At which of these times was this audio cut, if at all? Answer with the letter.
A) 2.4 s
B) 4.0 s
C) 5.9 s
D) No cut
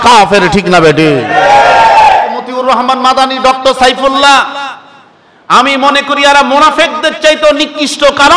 A